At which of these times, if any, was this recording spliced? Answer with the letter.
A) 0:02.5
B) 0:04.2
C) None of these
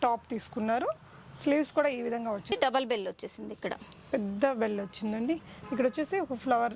A